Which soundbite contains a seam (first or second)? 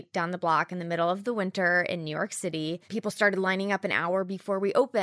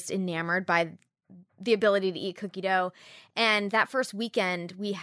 first